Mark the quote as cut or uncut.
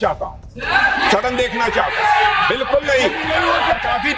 uncut